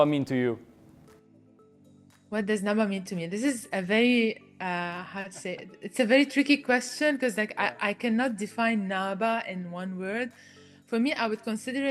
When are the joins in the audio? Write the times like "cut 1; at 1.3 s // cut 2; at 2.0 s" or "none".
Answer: none